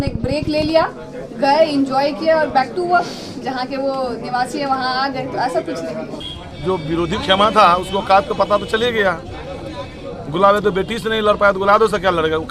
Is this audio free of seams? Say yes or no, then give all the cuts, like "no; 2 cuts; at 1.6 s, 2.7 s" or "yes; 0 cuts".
no; 1 cut; at 6.3 s